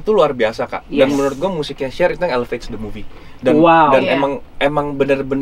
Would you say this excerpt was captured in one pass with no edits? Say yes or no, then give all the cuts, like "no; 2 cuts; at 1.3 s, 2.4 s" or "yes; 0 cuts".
yes; 0 cuts